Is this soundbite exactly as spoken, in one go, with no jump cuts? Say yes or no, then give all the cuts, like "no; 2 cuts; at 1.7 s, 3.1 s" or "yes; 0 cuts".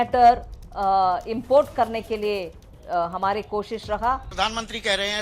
no; 1 cut; at 4.3 s